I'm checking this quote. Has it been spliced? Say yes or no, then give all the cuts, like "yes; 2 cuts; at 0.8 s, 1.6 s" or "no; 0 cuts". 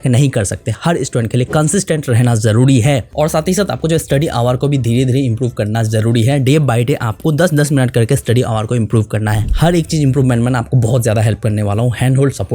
no; 0 cuts